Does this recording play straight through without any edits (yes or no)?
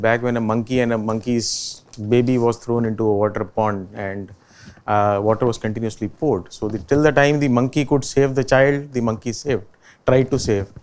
yes